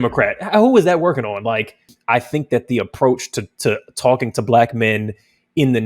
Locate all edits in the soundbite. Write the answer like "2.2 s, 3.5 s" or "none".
1.9 s

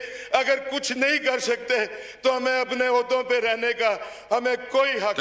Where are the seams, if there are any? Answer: none

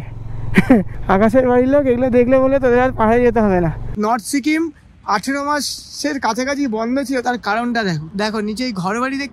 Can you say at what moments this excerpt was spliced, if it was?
0.9 s, 3.8 s, 8.1 s

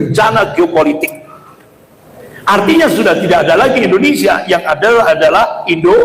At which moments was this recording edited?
none

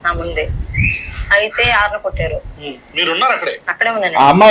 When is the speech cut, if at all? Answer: none

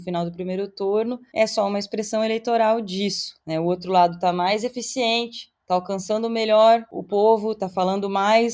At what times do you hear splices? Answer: 7.0 s

